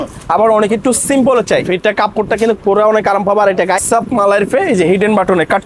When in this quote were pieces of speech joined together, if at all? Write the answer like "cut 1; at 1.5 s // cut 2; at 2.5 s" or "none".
cut 1; at 1.7 s // cut 2; at 3.8 s